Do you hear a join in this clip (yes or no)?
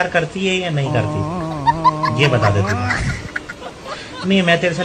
no